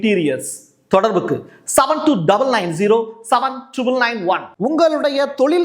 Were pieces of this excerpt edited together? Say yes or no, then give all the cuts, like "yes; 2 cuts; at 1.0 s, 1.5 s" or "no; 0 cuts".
yes; 1 cut; at 4.5 s